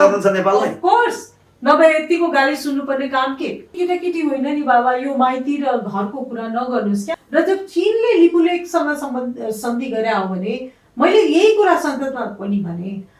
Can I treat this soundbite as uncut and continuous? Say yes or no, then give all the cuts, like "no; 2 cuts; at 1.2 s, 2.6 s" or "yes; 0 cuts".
no; 2 cuts; at 3.7 s, 7.2 s